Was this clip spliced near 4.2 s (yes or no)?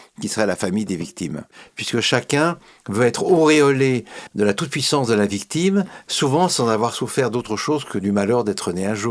yes